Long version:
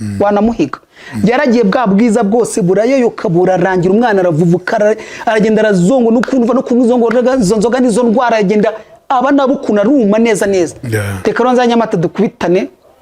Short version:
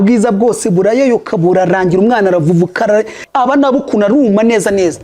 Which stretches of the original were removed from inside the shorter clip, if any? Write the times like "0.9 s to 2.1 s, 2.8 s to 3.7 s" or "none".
5.1 s to 8.9 s

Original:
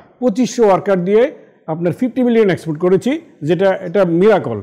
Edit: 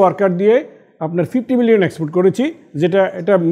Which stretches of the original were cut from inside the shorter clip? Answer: none

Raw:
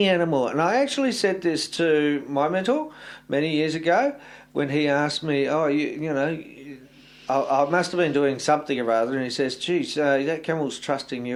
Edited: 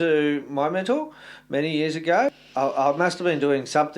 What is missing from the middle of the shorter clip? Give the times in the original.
4.2 s to 7.2 s

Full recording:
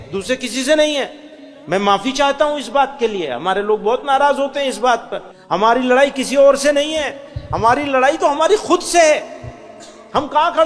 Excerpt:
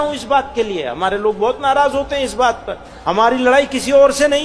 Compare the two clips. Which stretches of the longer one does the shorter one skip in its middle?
none

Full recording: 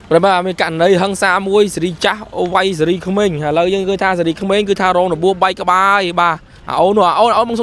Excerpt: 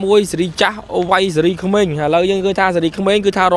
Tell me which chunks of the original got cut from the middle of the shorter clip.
none

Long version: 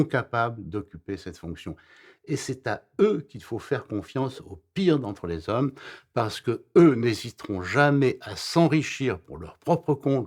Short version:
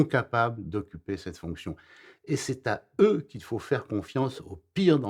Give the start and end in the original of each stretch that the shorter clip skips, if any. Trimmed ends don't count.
none

